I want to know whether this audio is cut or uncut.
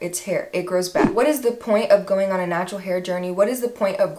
cut